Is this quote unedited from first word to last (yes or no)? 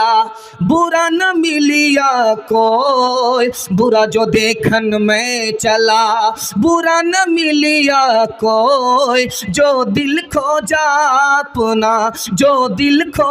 yes